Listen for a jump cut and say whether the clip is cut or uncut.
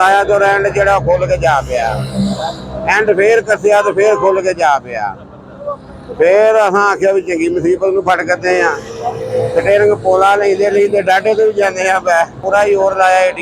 cut